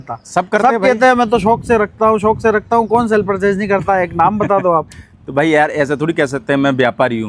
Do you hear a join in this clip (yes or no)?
no